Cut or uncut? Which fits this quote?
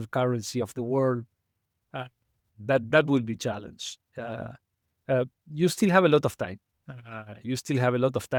uncut